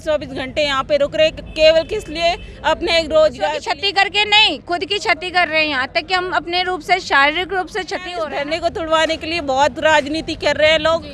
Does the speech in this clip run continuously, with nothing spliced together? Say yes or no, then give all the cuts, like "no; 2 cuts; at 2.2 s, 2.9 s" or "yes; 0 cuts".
no; 2 cuts; at 3.7 s, 8.1 s